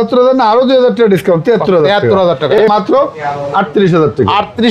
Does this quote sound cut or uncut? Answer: cut